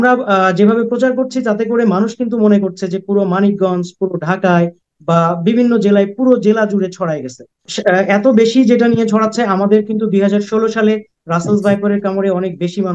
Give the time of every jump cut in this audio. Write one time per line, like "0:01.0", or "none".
0:07.7

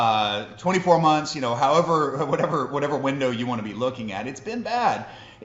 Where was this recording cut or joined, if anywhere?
none

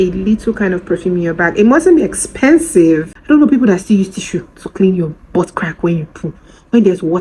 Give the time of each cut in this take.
0:03.1

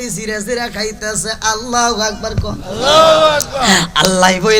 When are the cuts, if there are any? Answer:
none

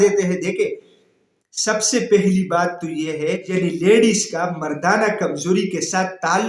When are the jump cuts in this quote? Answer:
0:03.5

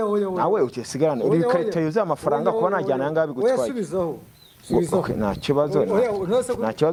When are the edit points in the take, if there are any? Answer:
none

